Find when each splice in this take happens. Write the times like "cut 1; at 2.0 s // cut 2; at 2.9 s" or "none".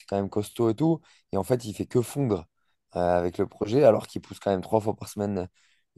none